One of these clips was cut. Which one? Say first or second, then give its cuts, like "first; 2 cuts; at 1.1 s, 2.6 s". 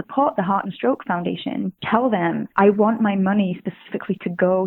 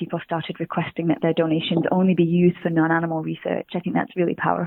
first; 2 cuts; at 1.8 s, 2.5 s